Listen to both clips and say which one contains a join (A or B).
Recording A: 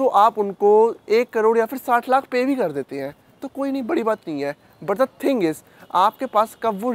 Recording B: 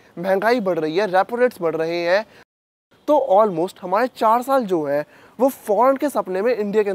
B